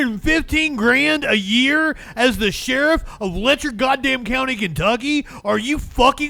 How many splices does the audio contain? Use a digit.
0